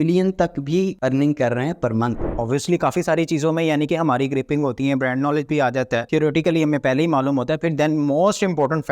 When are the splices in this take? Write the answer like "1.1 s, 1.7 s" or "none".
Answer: 0.9 s, 2.3 s, 6.1 s